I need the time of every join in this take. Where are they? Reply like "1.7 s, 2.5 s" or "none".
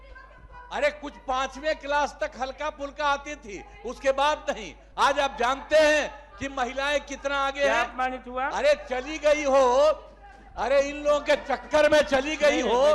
none